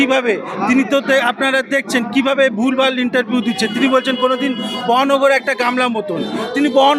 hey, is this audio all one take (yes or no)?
yes